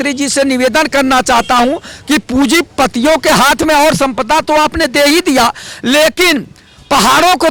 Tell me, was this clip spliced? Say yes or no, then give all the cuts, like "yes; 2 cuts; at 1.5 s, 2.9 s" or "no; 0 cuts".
no; 0 cuts